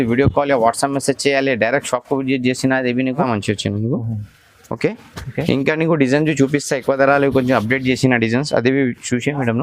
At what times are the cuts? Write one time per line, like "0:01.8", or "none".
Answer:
0:03.3